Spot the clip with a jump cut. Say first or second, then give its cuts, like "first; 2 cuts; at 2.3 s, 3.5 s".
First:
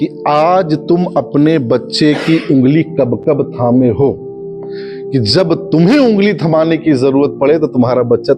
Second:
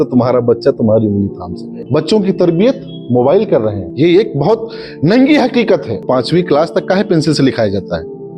second; 2 cuts; at 1.8 s, 6.0 s